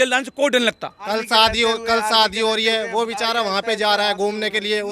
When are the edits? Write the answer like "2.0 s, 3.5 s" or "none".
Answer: 0.9 s